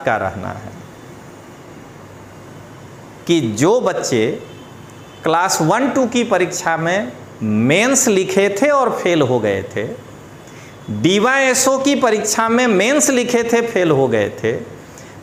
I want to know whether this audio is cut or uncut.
uncut